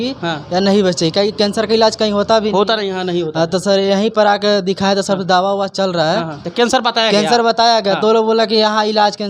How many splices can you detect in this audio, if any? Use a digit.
1